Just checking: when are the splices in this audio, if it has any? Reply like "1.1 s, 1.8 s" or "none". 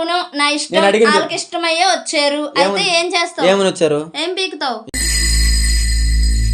4.8 s